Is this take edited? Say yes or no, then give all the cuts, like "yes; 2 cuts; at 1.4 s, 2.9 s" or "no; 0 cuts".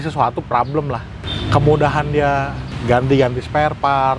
yes; 2 cuts; at 1.2 s, 2.7 s